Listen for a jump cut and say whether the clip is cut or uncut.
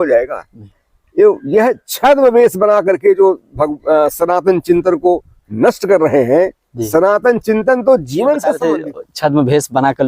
cut